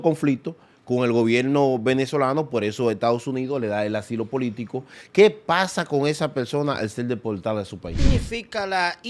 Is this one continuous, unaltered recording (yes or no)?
no